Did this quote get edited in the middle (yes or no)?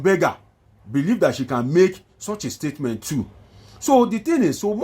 no